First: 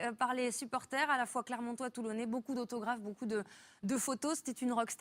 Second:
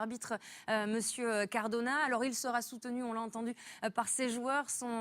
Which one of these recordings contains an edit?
second; 1 cut; at 2.9 s

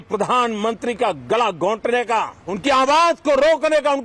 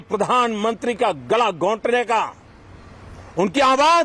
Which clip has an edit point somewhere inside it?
first; 1 cut; at 2.4 s

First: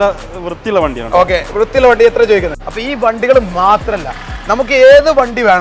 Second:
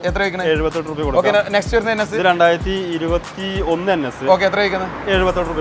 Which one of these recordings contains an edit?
first; 1 cut; at 2.5 s

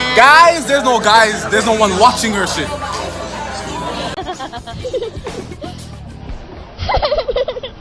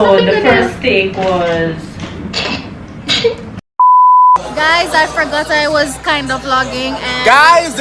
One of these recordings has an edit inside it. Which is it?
second; 2 cuts; at 3.6 s, 4.4 s

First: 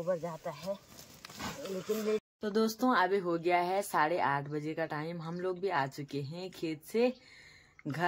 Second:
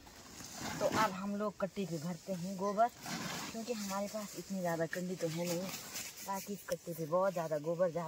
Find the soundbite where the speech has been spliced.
first; 1 cut; at 2.3 s

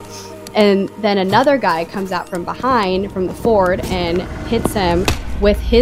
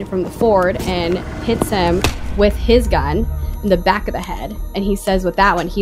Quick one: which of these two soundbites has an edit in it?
second; 1 cut; at 4.6 s

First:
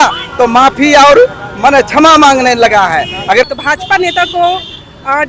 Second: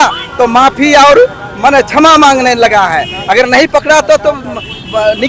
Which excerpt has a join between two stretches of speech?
first; 1 cut; at 3.5 s

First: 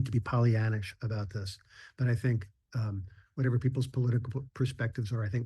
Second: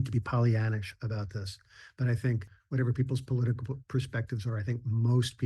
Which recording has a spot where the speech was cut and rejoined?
second; 1 cut; at 2.5 s

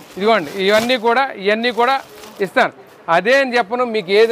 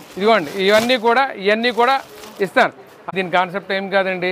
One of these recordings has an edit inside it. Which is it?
second; 1 cut; at 3.0 s

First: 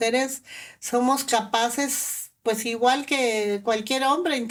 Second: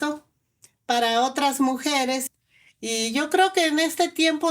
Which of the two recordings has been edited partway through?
second; 1 cut; at 2.2 s

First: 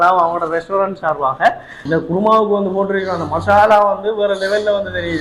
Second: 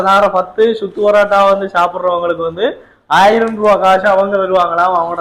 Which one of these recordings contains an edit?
first; 1 cut; at 1.7 s

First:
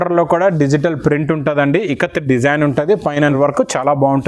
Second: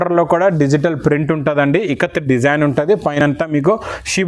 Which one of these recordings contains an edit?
first; 1 cut; at 3.3 s

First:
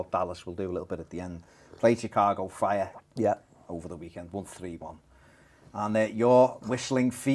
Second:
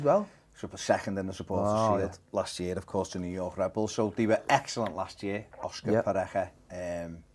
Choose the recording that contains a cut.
first; 1 cut; at 2.2 s

